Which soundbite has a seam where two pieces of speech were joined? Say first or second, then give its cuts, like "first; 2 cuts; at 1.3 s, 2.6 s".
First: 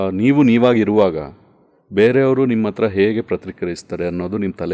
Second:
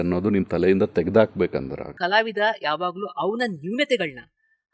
second; 1 cut; at 1.8 s